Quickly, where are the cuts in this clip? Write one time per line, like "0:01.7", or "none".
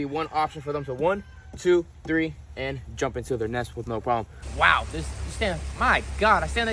0:04.4